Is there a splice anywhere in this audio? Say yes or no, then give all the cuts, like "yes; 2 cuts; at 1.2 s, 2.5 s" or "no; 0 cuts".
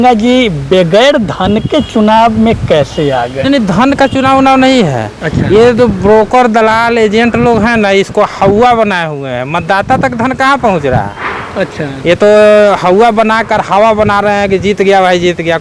no; 0 cuts